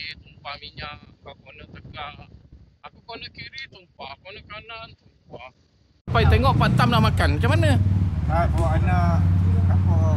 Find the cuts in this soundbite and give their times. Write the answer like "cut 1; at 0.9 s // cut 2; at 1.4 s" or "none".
cut 1; at 2.7 s // cut 2; at 6.1 s